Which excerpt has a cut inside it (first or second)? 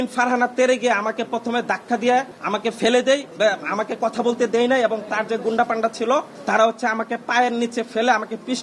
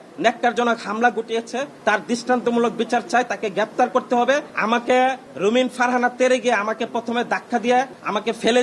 second